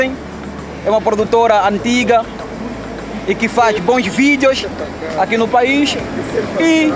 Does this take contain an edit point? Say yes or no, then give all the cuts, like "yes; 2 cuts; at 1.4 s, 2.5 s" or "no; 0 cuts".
no; 0 cuts